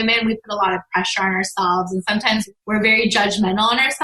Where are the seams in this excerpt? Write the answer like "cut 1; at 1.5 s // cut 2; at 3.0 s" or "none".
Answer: cut 1; at 2.5 s